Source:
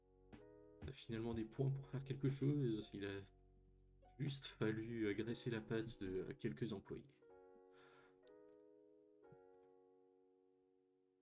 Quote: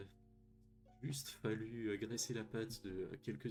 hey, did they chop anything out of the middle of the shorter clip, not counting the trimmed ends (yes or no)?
no